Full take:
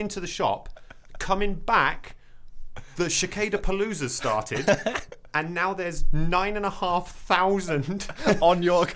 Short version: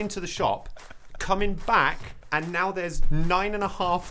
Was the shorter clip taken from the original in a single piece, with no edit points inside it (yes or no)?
no